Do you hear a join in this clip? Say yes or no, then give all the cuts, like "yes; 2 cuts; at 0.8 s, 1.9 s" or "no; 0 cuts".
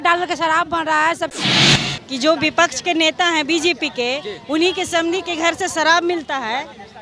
yes; 1 cut; at 1.5 s